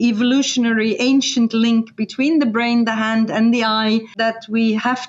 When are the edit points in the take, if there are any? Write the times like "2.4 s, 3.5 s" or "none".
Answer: 4.1 s